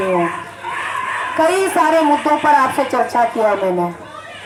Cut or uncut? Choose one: uncut